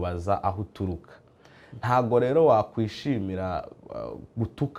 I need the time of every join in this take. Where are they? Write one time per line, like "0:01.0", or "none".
none